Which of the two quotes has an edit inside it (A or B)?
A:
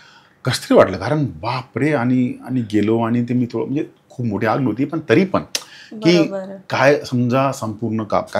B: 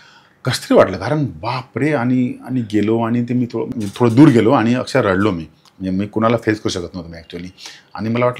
B